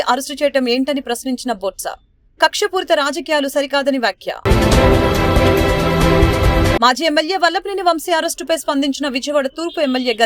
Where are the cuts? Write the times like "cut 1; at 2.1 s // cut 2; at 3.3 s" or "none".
none